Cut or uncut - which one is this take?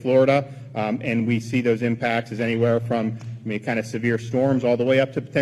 uncut